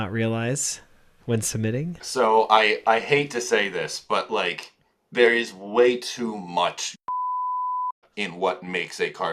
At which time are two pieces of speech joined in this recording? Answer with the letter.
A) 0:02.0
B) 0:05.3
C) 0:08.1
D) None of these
A